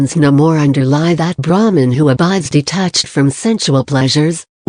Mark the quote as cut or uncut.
cut